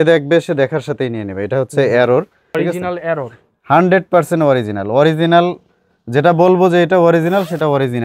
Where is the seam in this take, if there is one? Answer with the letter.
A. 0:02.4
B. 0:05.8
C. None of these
A